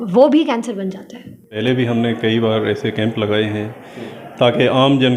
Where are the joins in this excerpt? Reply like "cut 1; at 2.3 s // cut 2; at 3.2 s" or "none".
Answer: cut 1; at 1.5 s